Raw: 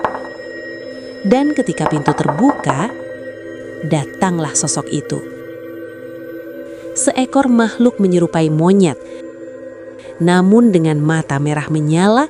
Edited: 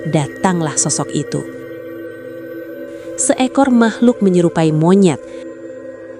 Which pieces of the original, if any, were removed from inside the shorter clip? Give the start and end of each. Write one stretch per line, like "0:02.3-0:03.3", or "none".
none